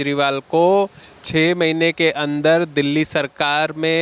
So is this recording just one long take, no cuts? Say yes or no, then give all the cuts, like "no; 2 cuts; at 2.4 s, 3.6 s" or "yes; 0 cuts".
yes; 0 cuts